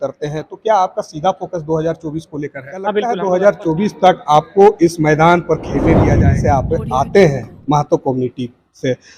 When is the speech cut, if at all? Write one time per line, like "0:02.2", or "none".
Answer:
0:03.2
0:06.3